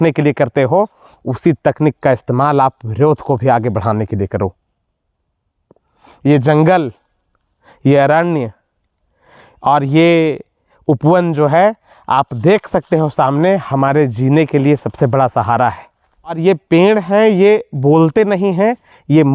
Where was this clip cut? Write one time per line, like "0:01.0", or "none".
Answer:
0:16.4